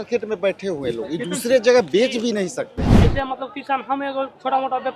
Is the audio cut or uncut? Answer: cut